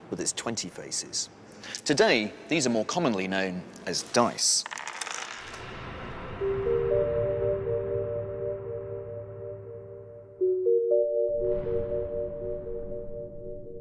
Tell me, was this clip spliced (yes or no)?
no